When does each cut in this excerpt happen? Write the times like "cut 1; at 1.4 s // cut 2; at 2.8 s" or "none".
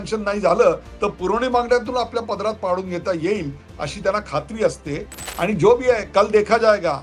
cut 1; at 5.2 s